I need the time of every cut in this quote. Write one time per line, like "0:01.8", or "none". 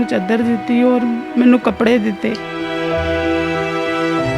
0:02.5